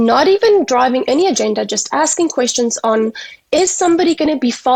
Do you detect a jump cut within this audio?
no; 0 cuts

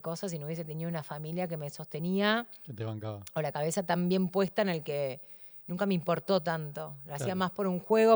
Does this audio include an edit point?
no; 0 cuts

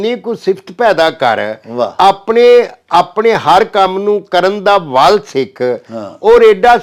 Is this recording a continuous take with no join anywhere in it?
yes; 0 cuts

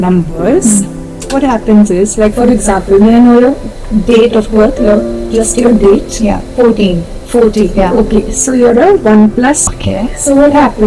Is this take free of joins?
no; 1 cut; at 9.7 s

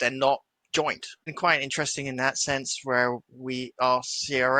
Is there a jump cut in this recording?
yes; 1 cut; at 1.3 s

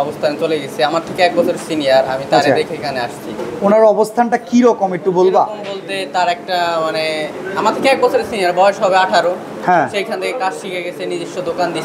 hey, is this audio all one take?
yes; 0 cuts

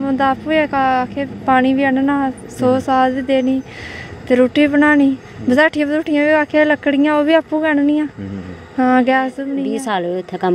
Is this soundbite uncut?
no; 1 cut; at 9.5 s

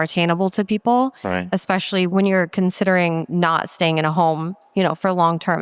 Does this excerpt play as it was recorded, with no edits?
no; 1 cut; at 2.1 s

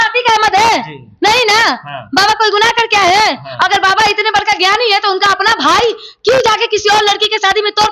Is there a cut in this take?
no; 0 cuts

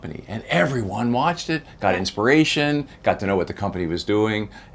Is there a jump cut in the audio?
no; 0 cuts

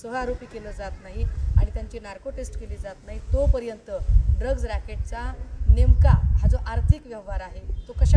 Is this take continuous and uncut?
yes; 0 cuts

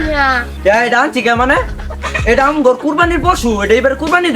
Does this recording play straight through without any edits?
yes; 0 cuts

